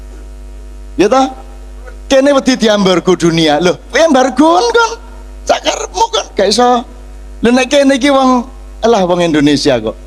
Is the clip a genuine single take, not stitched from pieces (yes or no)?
yes